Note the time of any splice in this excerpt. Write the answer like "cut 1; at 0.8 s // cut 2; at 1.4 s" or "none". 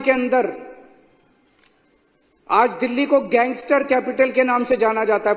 none

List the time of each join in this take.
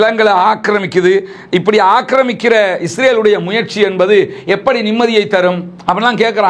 none

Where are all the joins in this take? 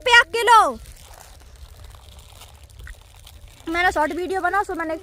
cut 1; at 1.0 s

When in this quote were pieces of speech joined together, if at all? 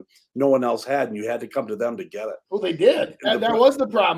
none

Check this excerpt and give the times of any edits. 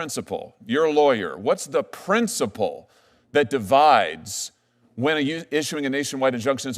none

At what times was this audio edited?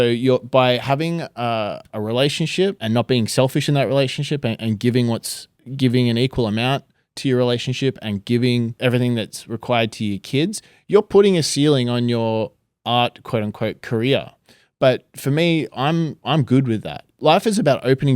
cut 1; at 1.9 s // cut 2; at 2.8 s // cut 3; at 8.7 s // cut 4; at 17.1 s

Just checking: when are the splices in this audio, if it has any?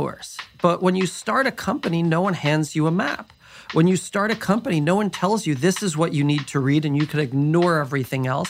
none

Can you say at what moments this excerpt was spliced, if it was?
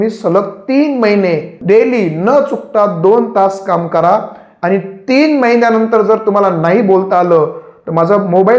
cut 1; at 1.5 s

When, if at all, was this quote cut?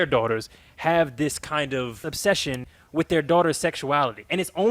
cut 1; at 2.1 s

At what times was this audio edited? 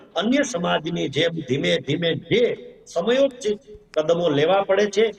none

